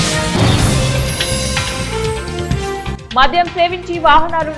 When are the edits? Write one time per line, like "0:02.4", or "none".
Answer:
0:02.6

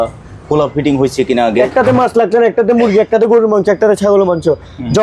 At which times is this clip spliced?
0:01.7

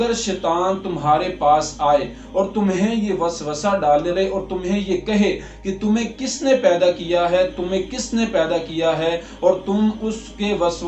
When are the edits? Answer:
0:04.1

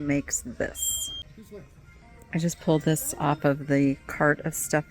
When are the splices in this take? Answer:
0:01.2

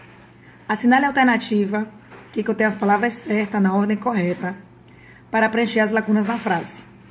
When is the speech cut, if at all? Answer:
none

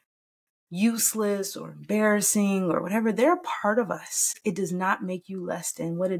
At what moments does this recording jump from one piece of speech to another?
0:04.4

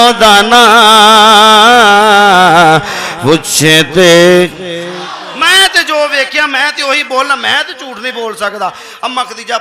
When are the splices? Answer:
0:05.2

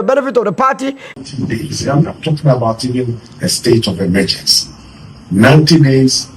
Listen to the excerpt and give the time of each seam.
0:01.2

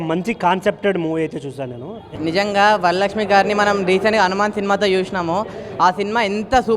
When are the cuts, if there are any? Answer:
0:02.1

